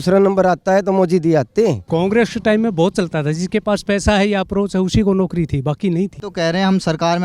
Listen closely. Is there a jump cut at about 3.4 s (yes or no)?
no